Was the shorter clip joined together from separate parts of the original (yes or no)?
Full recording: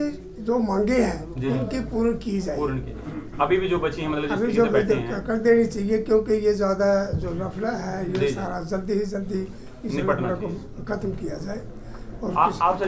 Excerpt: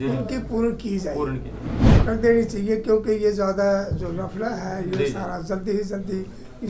yes